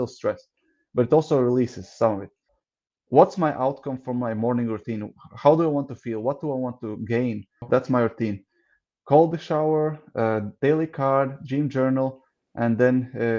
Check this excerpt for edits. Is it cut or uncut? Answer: cut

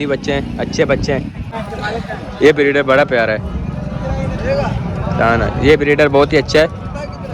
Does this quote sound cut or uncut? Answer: cut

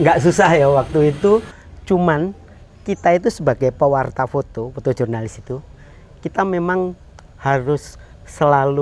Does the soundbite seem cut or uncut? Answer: uncut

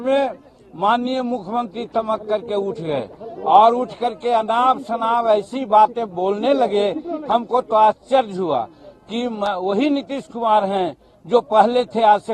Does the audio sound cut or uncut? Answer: uncut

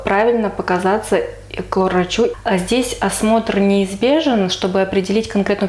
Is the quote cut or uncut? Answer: cut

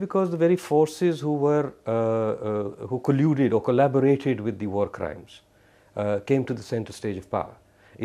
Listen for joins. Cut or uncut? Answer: uncut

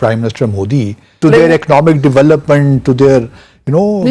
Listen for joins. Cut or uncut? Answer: cut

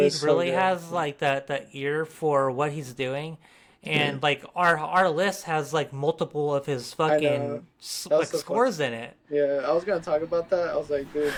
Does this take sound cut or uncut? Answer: uncut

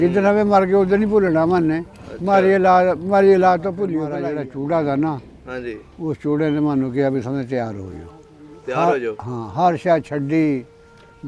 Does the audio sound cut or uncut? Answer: cut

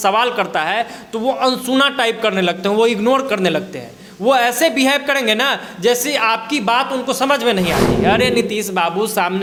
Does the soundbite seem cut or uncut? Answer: uncut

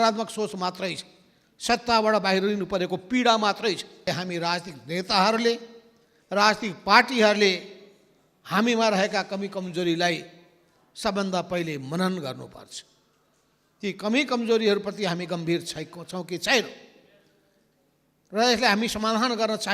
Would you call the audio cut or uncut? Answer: cut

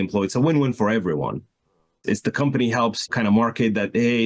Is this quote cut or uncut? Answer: cut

